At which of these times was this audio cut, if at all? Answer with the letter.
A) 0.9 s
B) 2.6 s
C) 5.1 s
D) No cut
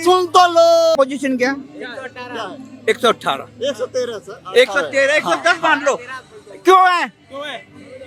A